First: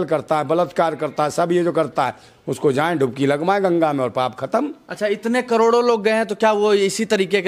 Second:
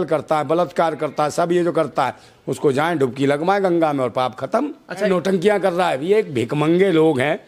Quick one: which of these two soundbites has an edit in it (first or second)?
second